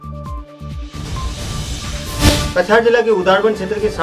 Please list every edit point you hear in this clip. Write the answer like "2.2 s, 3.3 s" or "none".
2.2 s